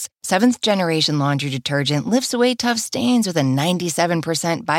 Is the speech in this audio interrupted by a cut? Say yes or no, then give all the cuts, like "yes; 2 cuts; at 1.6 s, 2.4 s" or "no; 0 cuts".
no; 0 cuts